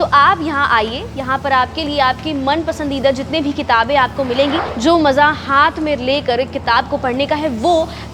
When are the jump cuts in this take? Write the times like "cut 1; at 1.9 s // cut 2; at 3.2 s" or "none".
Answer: cut 1; at 4.7 s